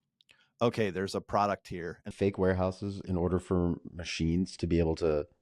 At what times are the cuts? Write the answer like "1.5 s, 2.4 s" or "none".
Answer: 2.1 s